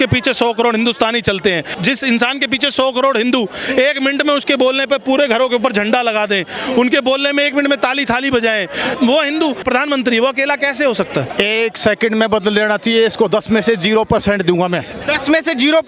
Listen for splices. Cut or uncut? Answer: cut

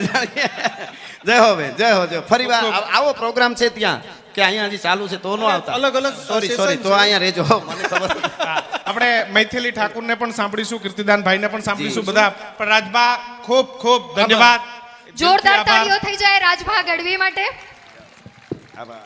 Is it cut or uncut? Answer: uncut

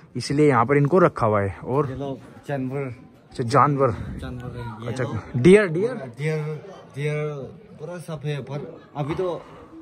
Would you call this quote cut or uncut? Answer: uncut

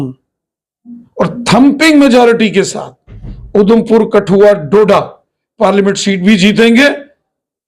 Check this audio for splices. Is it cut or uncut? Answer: uncut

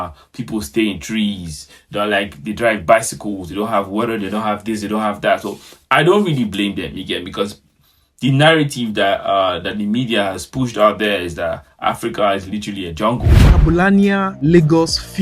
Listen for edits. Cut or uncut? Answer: cut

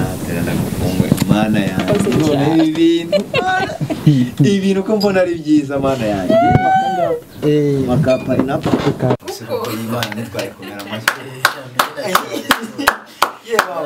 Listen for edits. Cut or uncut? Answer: uncut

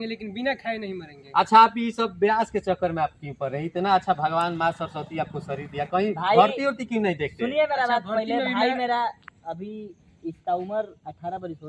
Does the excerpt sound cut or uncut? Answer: uncut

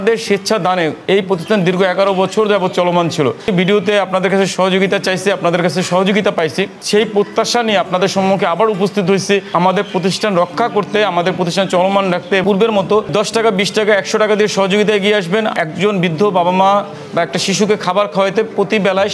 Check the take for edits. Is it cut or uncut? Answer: cut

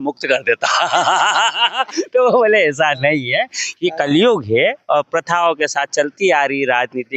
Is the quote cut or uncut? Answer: uncut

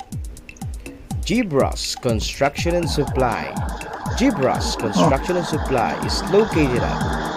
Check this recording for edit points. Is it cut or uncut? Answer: uncut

